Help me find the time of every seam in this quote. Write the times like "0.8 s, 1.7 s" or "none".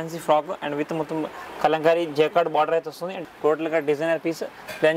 3.1 s

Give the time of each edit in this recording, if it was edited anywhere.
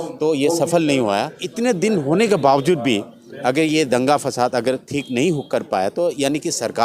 1.4 s

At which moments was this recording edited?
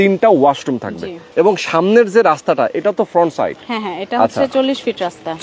1.2 s

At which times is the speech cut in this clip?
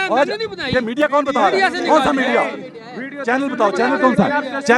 none

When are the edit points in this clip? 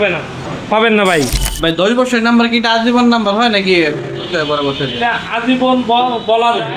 1.4 s

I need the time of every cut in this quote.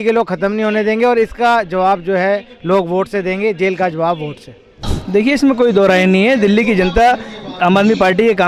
4.9 s

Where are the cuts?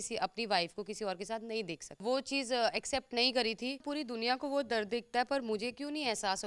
2.0 s, 3.9 s

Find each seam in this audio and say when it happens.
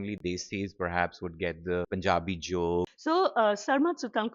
1.9 s, 2.9 s

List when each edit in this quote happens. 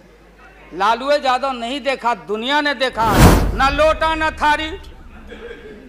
3.3 s

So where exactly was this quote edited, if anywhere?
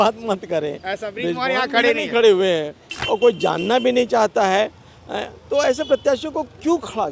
2.9 s

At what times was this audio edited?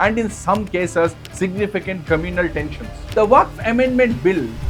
2.9 s

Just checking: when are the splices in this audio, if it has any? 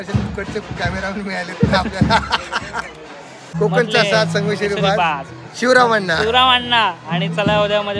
3.4 s

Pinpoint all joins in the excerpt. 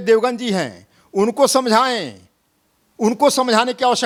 none

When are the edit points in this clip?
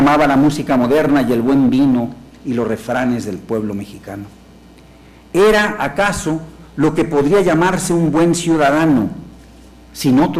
none

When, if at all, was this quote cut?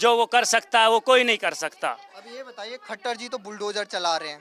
none

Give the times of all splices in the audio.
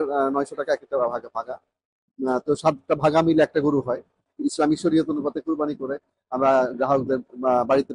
4.2 s

